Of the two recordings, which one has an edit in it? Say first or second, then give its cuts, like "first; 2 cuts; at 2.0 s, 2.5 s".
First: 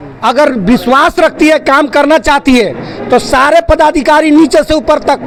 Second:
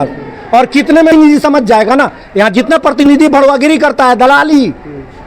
second; 1 cut; at 1.1 s